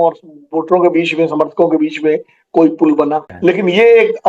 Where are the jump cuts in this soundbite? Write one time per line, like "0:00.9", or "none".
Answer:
0:03.3